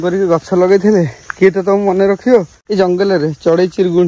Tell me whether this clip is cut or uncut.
cut